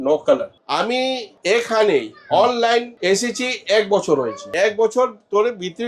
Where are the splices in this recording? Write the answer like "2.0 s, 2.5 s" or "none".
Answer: 1.1 s, 2.9 s, 4.5 s